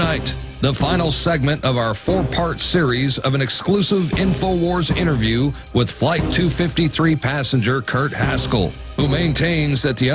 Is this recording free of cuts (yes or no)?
yes